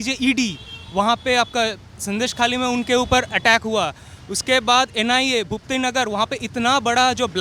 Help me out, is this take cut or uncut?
uncut